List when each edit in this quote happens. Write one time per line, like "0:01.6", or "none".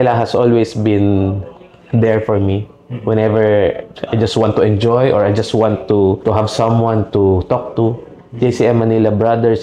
none